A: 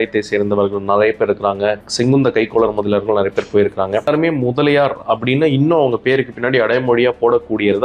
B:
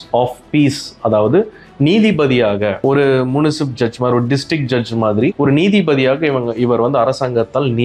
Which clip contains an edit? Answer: A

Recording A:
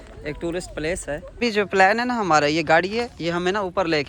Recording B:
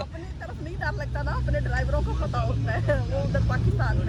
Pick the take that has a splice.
A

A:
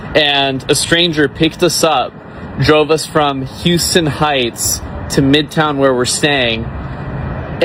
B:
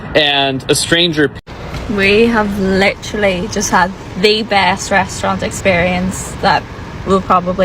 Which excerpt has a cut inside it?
B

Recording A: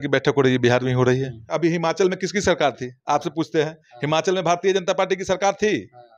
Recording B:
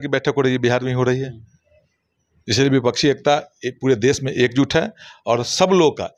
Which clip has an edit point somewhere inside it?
A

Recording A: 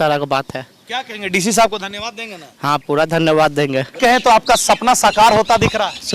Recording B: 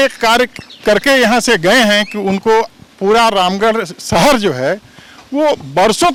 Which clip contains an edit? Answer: A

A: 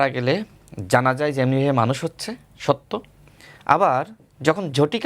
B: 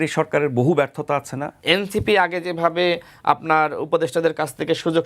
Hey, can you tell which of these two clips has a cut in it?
B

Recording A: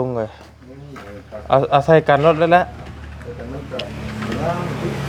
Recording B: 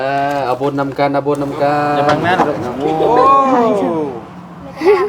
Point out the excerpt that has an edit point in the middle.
B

